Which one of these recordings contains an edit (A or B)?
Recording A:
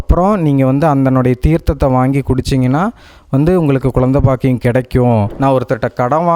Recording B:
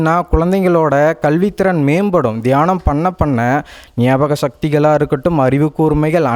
A